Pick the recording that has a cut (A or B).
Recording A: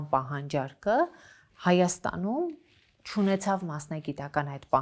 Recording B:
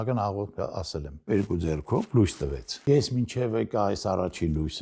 B